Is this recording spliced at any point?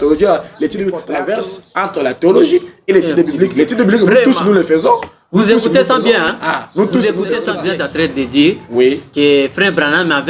yes; 2 cuts; at 1.1 s, 7.6 s

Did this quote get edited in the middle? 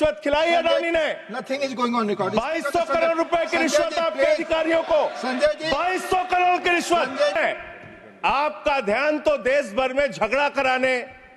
yes; 1 cut; at 7.4 s

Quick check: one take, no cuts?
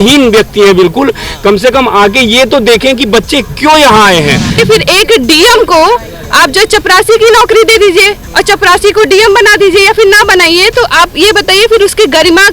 no; 1 cut; at 4.6 s

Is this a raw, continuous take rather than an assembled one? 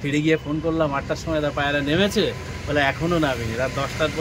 yes; 0 cuts

